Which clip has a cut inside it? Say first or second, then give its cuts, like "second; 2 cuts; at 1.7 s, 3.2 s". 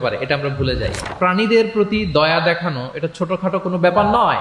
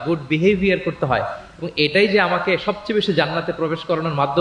first; 1 cut; at 1.1 s